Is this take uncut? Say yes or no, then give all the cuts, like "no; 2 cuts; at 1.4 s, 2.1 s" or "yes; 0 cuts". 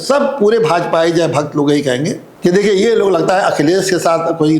no; 1 cut; at 2.2 s